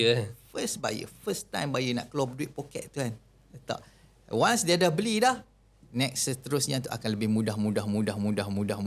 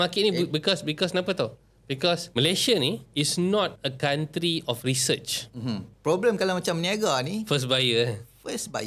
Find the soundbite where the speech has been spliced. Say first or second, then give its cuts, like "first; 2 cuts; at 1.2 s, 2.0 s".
second; 4 cuts; at 2.3 s, 3.1 s, 3.8 s, 5.9 s